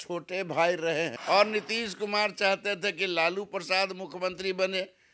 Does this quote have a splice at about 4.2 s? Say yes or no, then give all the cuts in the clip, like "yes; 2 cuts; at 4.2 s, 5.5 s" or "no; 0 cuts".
no; 1 cut; at 1.2 s